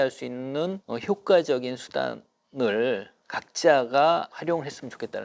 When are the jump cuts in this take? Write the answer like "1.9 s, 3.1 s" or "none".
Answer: 0.8 s, 4.3 s